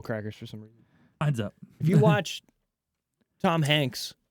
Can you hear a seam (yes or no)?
yes